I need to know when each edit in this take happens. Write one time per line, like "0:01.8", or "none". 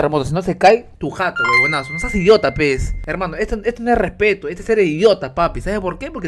0:00.9
0:03.0